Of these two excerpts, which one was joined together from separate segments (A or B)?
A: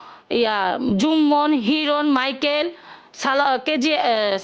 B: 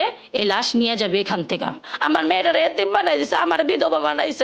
B